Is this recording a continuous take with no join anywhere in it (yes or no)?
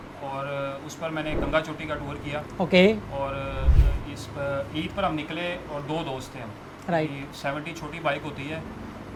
yes